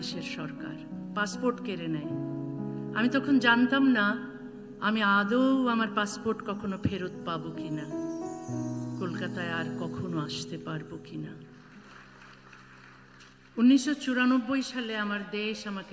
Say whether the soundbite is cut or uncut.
cut